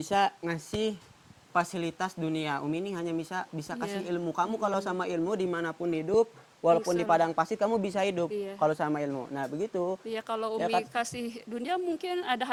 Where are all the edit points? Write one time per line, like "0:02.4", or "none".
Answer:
none